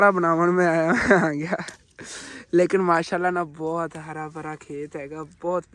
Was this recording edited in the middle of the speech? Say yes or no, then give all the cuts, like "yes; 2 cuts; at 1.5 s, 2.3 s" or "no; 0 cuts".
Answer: no; 0 cuts